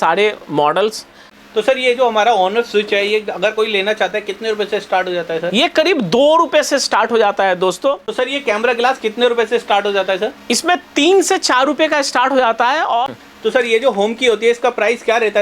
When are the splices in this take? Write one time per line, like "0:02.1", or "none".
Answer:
0:01.3
0:08.1
0:13.2